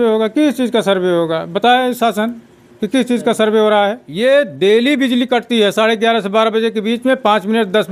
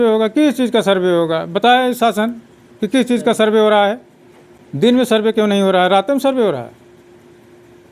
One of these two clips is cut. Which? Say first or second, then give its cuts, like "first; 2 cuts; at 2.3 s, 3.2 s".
first; 1 cut; at 4.1 s